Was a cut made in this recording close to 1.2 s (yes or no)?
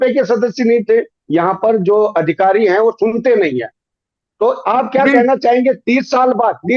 yes